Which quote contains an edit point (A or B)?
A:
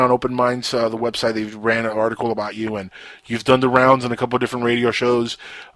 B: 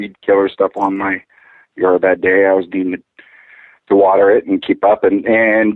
B